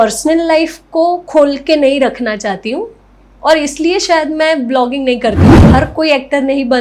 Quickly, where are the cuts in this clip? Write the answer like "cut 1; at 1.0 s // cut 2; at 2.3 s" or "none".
cut 1; at 5.5 s